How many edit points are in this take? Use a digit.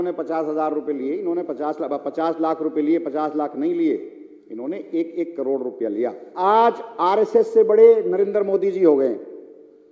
1